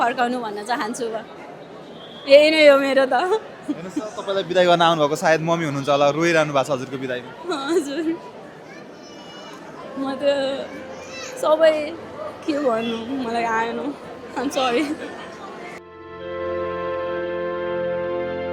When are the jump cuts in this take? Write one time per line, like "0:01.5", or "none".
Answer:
none